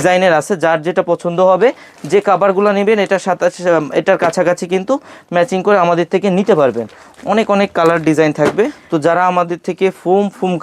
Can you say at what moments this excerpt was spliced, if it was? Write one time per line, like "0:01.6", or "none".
0:08.8